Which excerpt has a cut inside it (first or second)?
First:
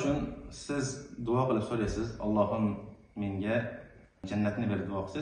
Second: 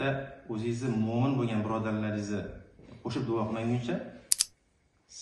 first